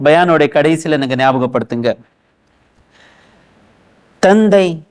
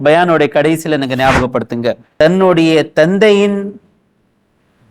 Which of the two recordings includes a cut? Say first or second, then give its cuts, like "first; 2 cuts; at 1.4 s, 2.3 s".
second; 1 cut; at 2.0 s